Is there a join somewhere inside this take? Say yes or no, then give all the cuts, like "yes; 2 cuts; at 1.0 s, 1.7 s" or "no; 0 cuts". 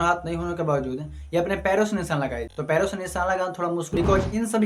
yes; 2 cuts; at 2.5 s, 3.9 s